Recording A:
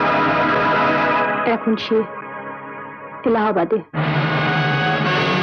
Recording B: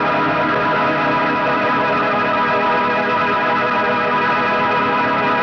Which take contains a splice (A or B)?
A